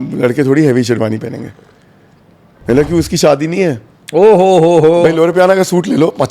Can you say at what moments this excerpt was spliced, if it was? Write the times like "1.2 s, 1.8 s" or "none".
5.0 s